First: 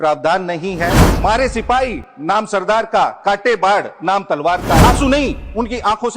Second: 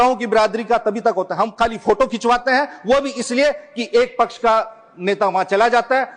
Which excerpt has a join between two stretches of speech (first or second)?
first